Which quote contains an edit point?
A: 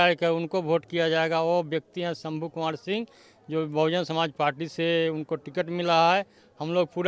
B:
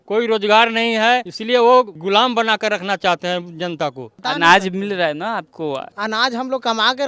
B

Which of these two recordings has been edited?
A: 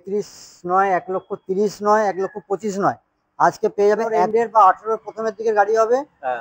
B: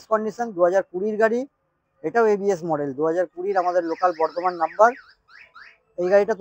A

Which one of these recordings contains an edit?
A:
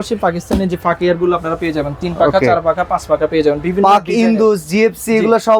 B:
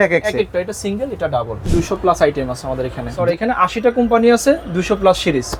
B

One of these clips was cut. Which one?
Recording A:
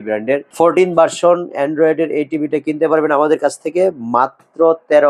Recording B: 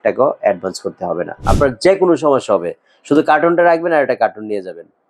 B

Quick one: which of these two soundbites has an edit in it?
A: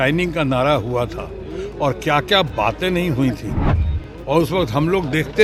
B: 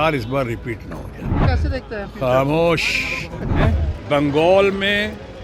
B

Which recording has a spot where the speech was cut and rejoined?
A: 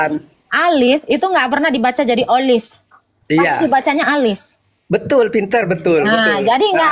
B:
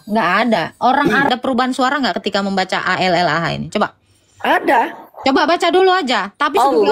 B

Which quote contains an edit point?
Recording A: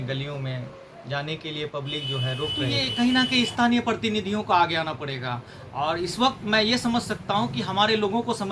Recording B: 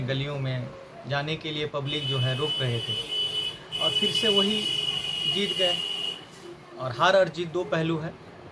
A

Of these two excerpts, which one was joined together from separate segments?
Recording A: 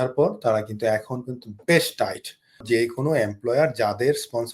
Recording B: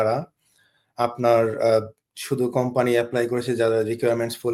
A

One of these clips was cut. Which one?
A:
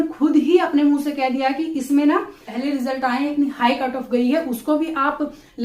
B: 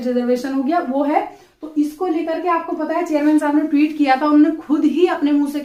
A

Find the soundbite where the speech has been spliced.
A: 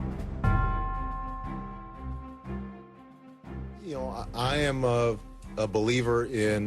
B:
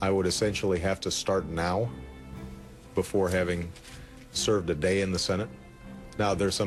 A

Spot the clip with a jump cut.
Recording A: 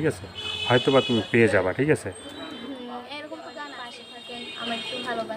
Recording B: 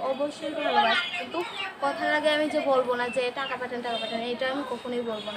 A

